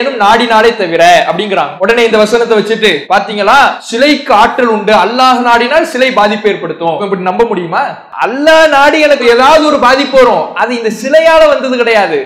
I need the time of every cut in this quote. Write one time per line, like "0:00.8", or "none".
0:01.7
0:03.0
0:03.8
0:07.0
0:08.0